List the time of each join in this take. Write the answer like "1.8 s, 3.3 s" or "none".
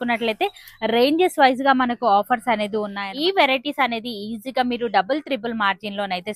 3.0 s